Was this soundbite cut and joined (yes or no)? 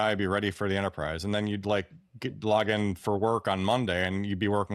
no